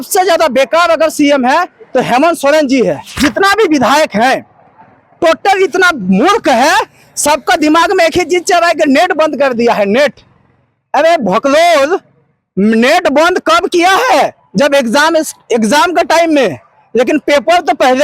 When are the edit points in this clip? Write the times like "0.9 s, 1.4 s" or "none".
3.2 s